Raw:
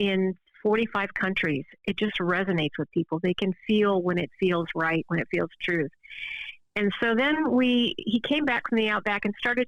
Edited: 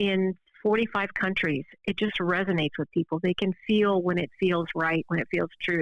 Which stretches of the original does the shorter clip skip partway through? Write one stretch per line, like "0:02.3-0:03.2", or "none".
none